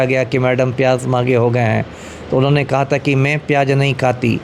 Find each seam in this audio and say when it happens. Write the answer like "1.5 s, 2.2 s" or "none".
none